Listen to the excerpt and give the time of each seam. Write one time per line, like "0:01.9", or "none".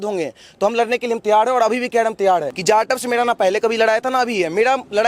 0:02.5